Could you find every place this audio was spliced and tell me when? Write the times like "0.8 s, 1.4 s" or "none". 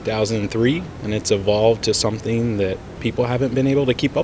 0.9 s, 2.9 s